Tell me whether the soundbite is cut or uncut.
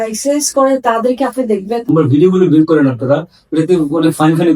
cut